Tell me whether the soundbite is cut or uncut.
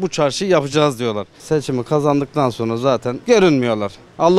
cut